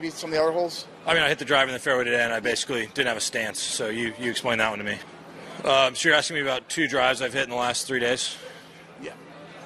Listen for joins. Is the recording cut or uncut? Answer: uncut